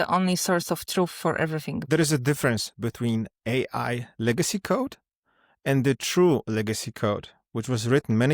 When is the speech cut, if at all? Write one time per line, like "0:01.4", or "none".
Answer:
0:01.9